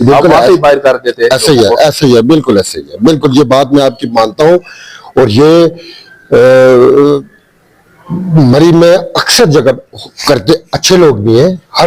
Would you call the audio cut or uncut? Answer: uncut